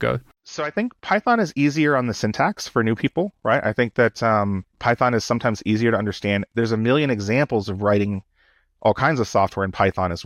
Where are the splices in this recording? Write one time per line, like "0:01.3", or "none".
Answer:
none